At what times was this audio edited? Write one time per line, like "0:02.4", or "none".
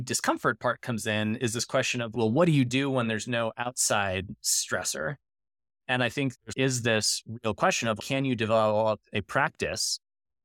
0:02.1
0:06.3
0:08.0